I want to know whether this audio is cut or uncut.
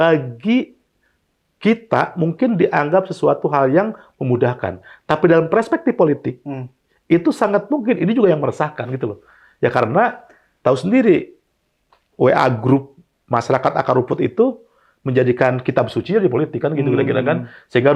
uncut